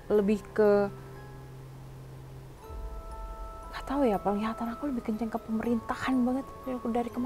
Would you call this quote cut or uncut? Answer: uncut